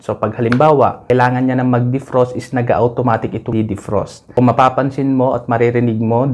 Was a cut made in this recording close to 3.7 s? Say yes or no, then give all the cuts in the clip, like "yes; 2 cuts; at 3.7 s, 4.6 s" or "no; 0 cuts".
yes; 2 cuts; at 1.0 s, 3.7 s